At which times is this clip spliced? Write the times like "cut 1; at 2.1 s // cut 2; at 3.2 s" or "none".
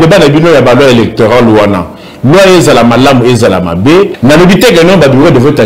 cut 1; at 4.1 s